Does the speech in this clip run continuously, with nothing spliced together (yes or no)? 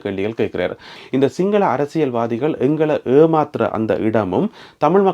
no